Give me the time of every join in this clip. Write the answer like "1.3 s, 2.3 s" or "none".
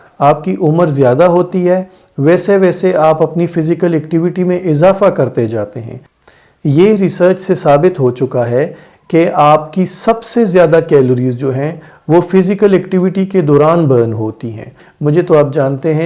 6.0 s, 14.7 s